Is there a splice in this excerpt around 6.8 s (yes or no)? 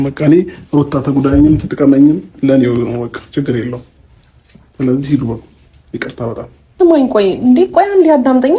yes